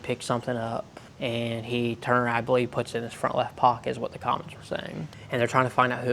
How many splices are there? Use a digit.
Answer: 2